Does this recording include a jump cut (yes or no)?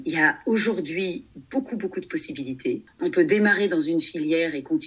yes